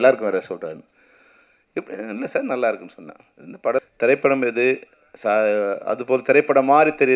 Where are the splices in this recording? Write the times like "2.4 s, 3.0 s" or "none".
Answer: 3.9 s